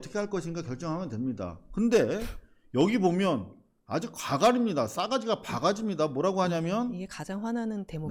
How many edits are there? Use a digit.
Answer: 0